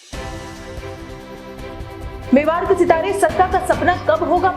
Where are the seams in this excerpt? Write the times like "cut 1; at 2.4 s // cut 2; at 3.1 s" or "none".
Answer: cut 1; at 1.3 s